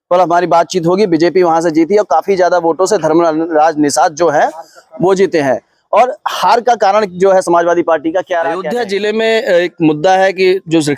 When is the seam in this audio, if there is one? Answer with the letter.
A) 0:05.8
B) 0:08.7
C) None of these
B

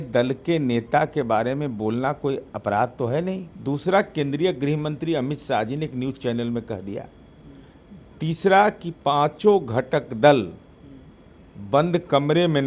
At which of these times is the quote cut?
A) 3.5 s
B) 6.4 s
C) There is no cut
A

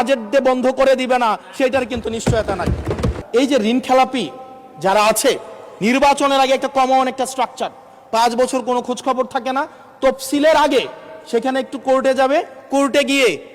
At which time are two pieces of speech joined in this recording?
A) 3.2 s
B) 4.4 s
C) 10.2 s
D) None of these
A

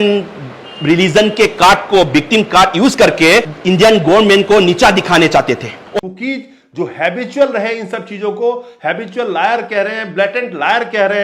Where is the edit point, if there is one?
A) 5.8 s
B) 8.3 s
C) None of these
A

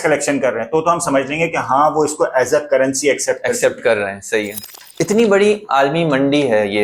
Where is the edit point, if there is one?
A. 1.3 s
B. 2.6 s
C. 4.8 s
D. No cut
C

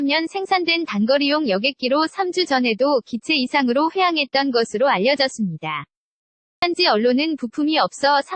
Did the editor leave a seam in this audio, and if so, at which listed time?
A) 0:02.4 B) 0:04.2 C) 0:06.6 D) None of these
C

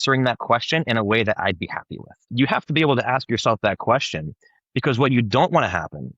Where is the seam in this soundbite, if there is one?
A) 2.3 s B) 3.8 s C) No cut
A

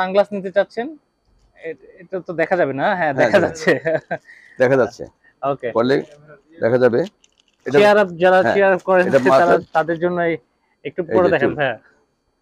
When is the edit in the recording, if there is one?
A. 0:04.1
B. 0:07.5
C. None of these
B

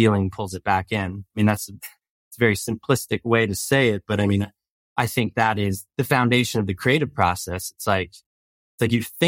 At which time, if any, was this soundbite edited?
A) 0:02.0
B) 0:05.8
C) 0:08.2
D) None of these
B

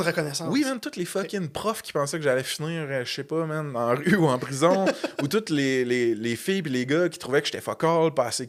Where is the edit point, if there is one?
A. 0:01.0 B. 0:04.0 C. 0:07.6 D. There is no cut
D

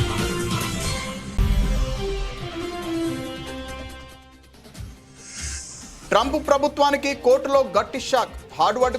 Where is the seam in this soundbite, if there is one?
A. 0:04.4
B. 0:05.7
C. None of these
B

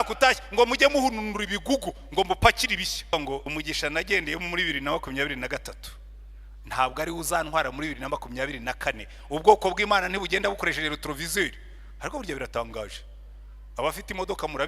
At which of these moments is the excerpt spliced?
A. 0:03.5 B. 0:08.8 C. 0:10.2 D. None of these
A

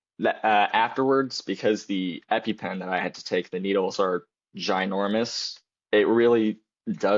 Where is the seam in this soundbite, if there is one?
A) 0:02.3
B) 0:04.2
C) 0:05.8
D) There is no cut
D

